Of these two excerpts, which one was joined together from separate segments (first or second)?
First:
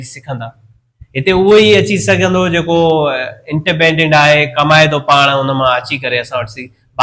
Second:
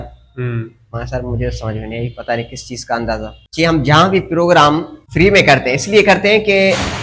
second